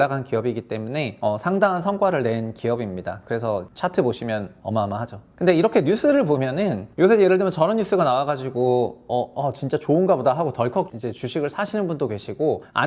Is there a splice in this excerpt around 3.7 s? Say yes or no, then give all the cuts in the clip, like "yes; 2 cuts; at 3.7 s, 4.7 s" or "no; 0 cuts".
yes; 2 cuts; at 3.7 s, 6.8 s